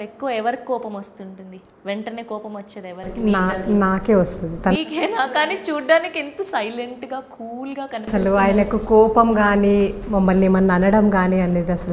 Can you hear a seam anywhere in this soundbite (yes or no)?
no